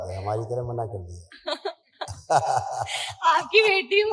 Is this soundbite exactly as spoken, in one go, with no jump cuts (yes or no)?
yes